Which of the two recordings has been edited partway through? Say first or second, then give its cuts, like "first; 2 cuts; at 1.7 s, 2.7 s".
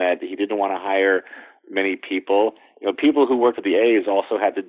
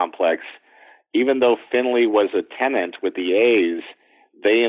first; 1 cut; at 3.6 s